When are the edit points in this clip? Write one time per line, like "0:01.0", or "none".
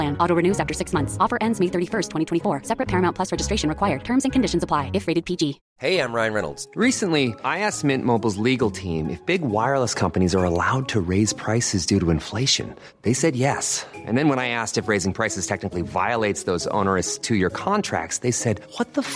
0:05.7

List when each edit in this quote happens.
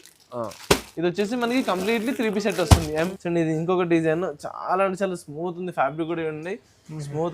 0:03.1

